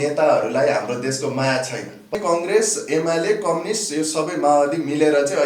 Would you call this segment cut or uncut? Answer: cut